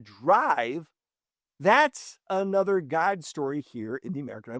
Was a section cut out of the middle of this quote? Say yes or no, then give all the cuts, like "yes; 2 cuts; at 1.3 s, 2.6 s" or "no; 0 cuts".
no; 0 cuts